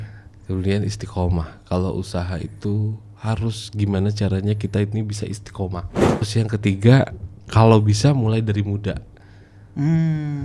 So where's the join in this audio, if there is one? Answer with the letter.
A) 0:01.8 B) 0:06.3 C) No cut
B